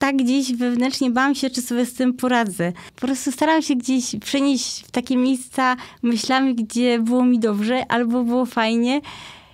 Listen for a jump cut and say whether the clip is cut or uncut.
cut